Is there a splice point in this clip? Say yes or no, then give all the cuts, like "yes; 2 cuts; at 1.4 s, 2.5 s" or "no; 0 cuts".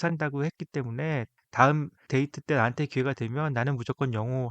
yes; 2 cuts; at 1.4 s, 2.0 s